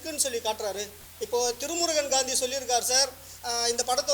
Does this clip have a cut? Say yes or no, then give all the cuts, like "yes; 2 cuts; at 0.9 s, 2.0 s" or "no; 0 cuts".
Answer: yes; 1 cut; at 1.0 s